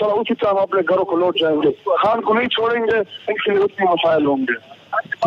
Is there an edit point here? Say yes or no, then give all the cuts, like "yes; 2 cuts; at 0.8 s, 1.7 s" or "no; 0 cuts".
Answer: no; 0 cuts